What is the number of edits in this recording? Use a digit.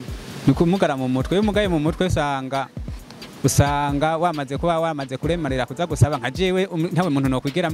0